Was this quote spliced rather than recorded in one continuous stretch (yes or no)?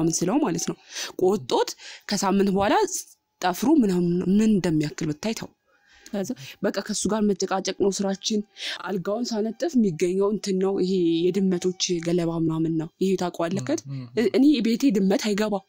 no